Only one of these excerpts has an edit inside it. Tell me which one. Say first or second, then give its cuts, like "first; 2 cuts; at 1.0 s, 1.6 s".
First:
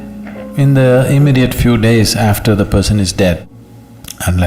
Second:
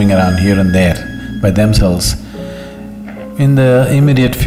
first; 1 cut; at 3.4 s